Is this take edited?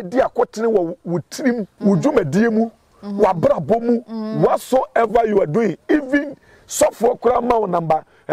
yes; 1 cut; at 1.7 s

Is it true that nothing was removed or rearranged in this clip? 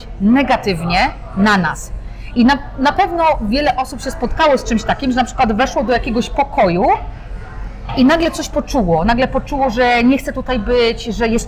yes; 0 cuts

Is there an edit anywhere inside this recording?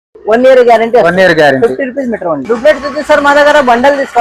yes; 1 cut; at 2.4 s

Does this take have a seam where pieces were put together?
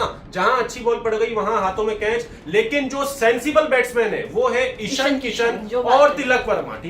no; 0 cuts

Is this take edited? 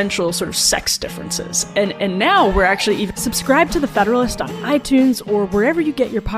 yes; 1 cut; at 3.1 s

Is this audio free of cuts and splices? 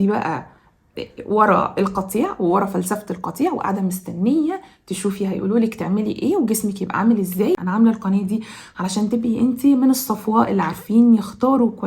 no; 1 cut; at 7.6 s

